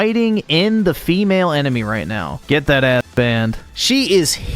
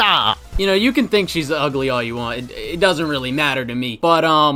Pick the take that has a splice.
first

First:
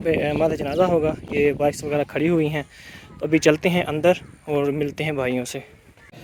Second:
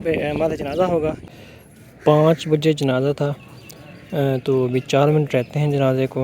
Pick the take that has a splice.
second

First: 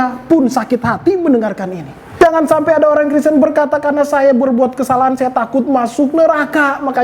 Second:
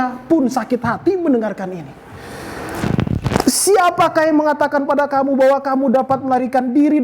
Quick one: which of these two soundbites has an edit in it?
first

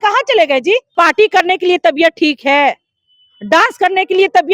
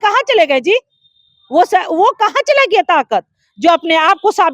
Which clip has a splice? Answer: first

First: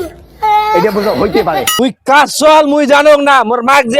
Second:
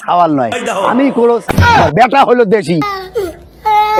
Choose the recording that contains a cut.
first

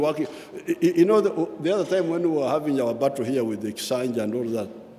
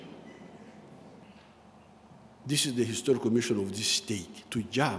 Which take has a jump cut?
second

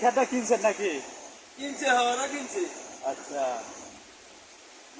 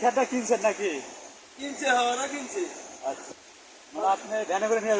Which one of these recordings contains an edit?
second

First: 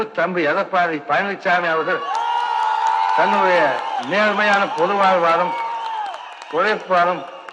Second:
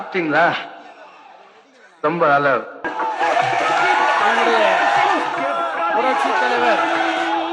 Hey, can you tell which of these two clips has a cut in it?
second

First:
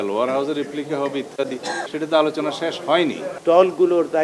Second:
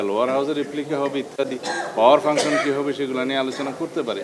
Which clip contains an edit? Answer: first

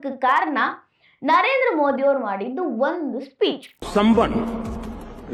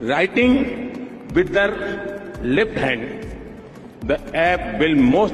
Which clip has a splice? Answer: first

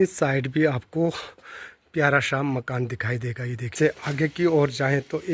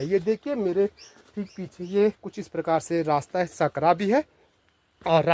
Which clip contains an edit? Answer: first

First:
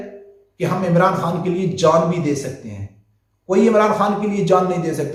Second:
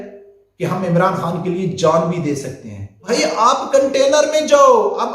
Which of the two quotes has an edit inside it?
second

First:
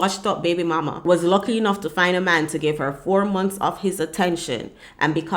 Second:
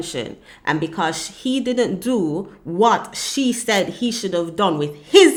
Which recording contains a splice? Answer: first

